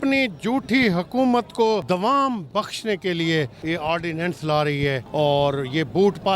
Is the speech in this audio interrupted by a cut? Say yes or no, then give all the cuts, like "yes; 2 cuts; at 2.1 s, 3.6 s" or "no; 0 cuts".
yes; 3 cuts; at 1.8 s, 3.6 s, 5.0 s